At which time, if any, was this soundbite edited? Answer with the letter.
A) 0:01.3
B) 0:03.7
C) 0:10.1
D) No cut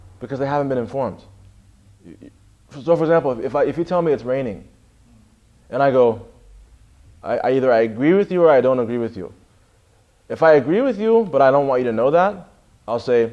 C